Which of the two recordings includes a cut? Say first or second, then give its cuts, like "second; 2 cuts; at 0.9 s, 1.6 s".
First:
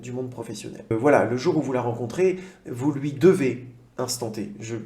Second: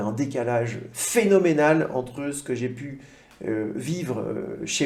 first; 1 cut; at 0.9 s